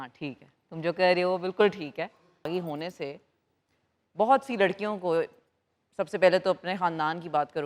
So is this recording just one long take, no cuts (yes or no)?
no